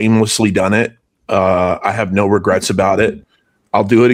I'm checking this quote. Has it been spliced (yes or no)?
no